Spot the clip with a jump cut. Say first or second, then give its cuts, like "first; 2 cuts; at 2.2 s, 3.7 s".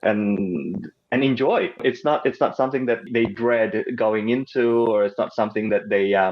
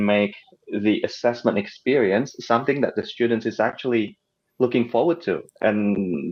first; 2 cuts; at 1.8 s, 3.1 s